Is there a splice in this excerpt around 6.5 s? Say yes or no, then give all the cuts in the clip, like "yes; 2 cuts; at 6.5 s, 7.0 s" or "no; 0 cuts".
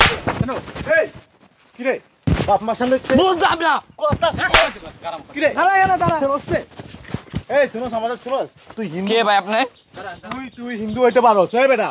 no; 0 cuts